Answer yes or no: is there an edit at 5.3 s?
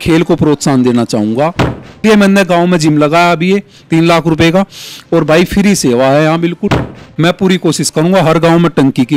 no